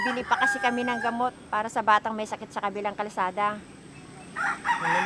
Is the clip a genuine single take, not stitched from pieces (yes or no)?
yes